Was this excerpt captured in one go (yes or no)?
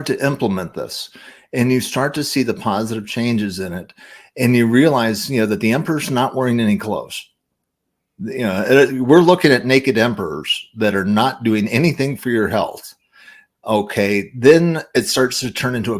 yes